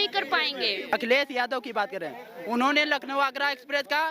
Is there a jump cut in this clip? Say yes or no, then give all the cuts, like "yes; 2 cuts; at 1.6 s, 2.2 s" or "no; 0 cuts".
yes; 1 cut; at 0.9 s